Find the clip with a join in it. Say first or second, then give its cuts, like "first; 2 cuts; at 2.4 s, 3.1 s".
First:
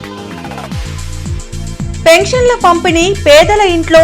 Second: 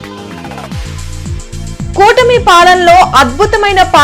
first; 1 cut; at 1.7 s